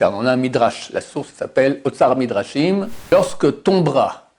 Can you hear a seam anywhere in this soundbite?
yes; 1 cut; at 3.1 s

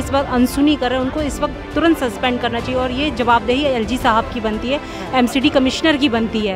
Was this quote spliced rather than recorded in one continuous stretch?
no; 0 cuts

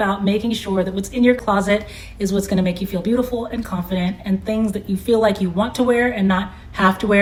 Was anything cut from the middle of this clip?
no; 0 cuts

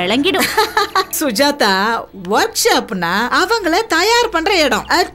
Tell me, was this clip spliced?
no; 0 cuts

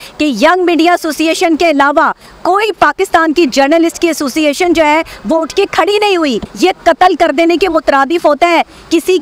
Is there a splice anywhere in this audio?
yes; 1 cut; at 6.5 s

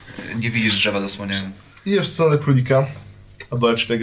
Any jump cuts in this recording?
yes; 1 cut; at 1.6 s

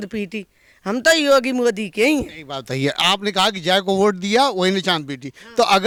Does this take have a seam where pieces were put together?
no; 0 cuts

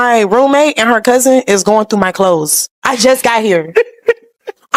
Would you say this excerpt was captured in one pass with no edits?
yes; 0 cuts

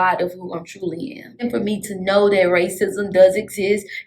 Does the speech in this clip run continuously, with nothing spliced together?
no; 1 cut; at 1.5 s

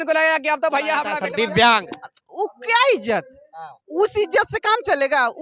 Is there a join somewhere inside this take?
yes; 1 cut; at 1.2 s

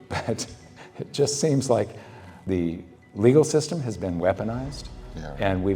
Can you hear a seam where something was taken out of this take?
yes; 1 cut; at 2.3 s

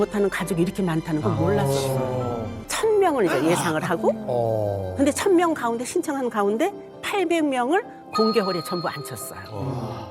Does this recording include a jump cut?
yes; 1 cut; at 2.5 s

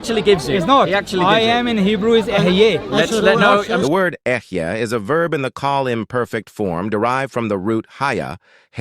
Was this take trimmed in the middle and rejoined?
yes; 1 cut; at 3.8 s

